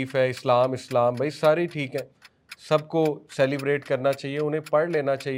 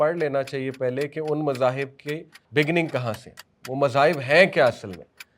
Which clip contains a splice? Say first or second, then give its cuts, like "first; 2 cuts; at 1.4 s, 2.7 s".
second; 1 cut; at 2.3 s